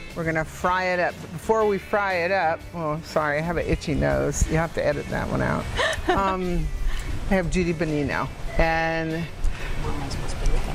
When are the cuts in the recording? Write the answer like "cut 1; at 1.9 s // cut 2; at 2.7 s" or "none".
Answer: none